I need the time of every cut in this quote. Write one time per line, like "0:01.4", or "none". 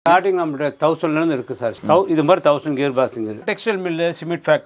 0:01.8
0:03.5